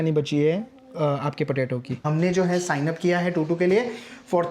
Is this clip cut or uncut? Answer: cut